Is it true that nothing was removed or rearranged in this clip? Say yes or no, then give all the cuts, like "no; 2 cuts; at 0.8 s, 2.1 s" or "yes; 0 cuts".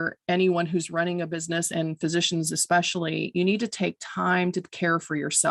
yes; 0 cuts